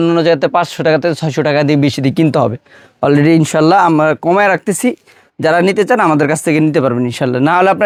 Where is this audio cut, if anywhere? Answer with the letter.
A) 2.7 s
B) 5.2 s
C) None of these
C